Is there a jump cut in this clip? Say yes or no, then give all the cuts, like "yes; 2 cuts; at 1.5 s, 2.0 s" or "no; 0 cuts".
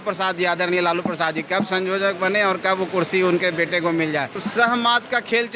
yes; 1 cut; at 4.4 s